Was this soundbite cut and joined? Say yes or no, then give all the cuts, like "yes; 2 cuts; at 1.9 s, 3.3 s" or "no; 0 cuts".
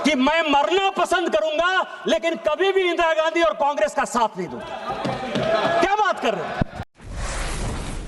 yes; 1 cut; at 6.9 s